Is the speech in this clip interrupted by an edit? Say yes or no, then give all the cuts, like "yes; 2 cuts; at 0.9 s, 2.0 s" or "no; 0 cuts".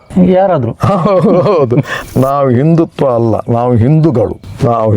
yes; 1 cut; at 1.9 s